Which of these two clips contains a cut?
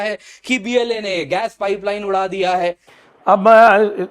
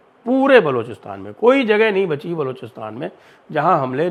first; 1 cut; at 2.9 s

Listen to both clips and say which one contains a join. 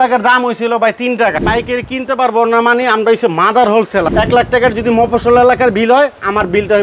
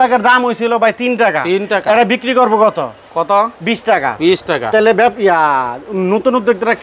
first; 2 cuts; at 1.4 s, 4.1 s

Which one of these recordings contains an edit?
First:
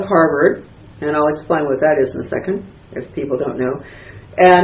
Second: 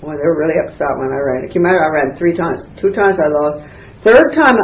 second; 1 cut; at 3.2 s

